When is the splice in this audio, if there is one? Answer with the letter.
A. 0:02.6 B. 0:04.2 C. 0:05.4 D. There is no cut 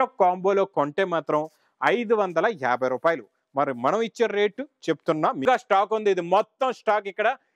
C